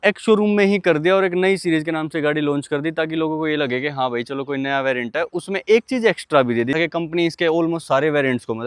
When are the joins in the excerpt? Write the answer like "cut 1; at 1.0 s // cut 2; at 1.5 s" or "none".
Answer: cut 1; at 6.7 s